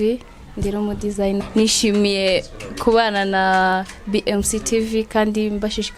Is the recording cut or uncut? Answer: cut